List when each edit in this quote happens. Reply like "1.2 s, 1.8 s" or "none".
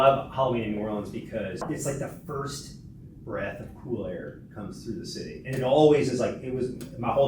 1.6 s